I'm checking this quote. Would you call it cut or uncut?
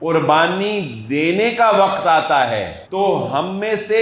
cut